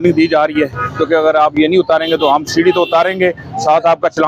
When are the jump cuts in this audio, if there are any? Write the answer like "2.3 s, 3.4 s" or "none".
none